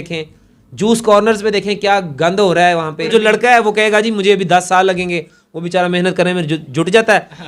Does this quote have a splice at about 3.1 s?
yes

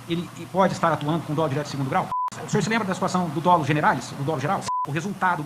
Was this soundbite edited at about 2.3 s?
yes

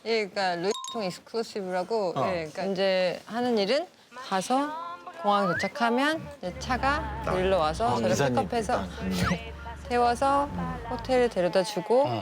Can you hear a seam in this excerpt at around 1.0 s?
no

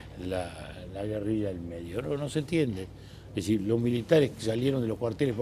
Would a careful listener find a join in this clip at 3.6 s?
no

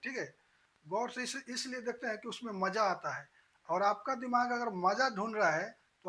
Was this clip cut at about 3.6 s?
no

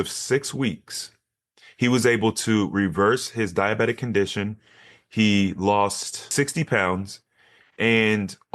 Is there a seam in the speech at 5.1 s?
no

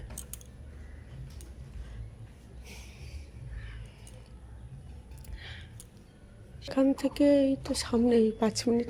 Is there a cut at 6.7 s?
no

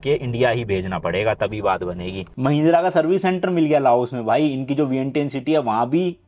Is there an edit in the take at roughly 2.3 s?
yes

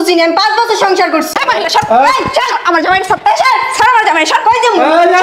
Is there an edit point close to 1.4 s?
yes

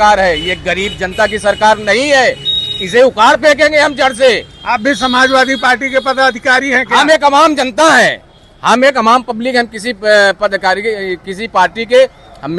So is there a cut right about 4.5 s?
no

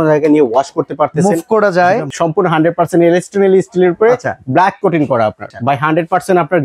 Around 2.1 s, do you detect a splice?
yes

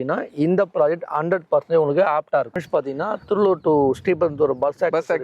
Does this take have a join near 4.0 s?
no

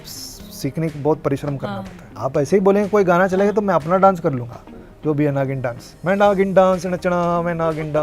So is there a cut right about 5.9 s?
yes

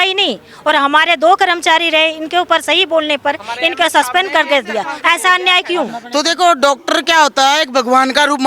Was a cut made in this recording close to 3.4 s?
no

